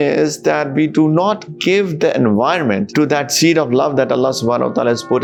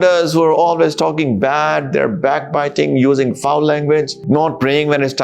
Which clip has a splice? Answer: second; 1 cut; at 4.2 s

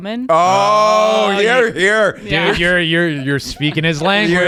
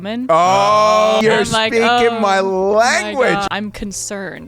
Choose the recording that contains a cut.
second; 2 cuts; at 1.2 s, 3.5 s

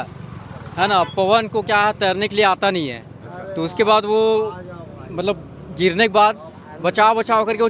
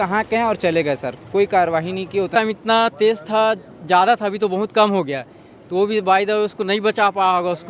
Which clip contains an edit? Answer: second; 1 cut; at 2.3 s

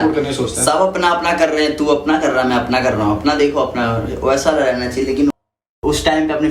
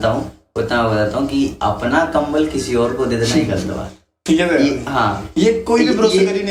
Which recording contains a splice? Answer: first; 1 cut; at 5.3 s

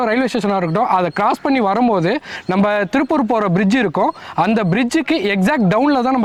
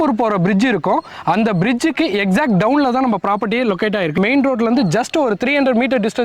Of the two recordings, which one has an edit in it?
second; 1 cut; at 4.1 s

